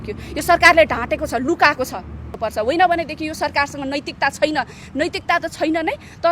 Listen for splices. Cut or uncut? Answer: cut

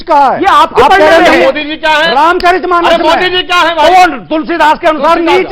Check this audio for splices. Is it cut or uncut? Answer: uncut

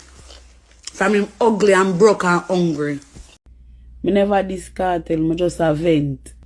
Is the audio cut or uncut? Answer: cut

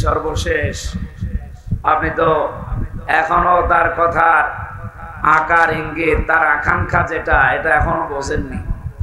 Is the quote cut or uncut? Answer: uncut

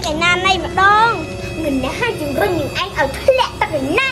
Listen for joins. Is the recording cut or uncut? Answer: cut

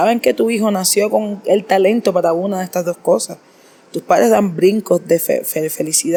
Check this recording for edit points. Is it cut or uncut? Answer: uncut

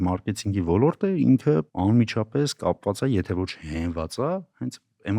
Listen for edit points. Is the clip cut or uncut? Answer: cut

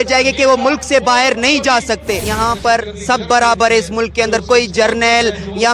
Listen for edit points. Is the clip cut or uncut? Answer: cut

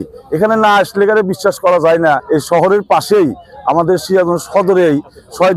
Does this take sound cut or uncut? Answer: cut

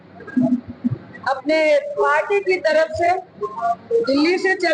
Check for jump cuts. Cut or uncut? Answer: uncut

